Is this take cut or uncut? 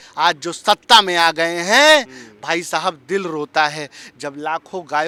uncut